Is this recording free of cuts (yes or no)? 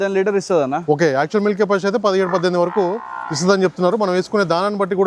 yes